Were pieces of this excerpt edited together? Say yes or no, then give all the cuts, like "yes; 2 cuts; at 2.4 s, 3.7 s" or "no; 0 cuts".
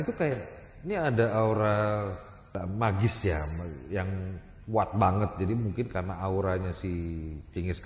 yes; 1 cut; at 2.5 s